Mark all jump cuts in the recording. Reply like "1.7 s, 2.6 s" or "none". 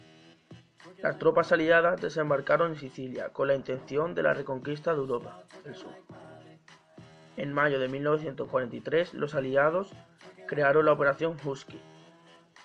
1.0 s